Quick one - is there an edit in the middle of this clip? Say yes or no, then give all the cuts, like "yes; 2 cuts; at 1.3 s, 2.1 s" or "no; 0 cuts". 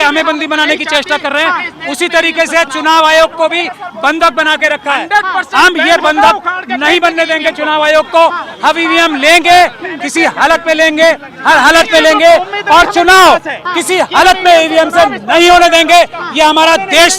no; 0 cuts